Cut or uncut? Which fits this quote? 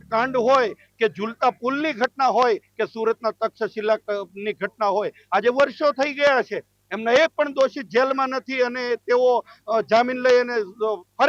uncut